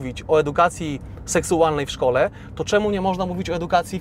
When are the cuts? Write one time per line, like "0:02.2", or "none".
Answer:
none